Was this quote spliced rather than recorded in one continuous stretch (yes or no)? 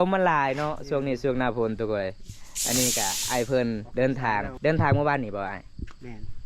yes